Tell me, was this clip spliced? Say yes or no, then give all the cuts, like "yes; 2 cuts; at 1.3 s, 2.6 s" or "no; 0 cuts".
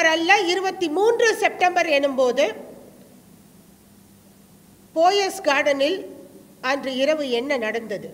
no; 0 cuts